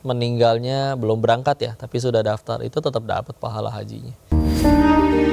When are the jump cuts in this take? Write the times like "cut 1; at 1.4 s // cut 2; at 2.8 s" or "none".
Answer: cut 1; at 4.3 s